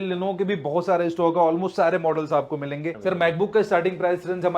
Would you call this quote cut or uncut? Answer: cut